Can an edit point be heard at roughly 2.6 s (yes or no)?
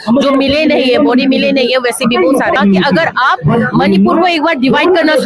yes